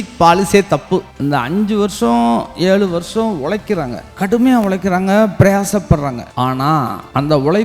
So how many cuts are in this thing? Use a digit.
3